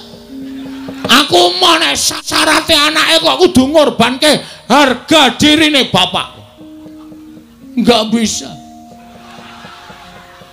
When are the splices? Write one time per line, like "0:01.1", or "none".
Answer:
none